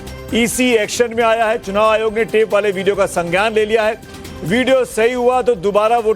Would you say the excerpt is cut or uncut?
uncut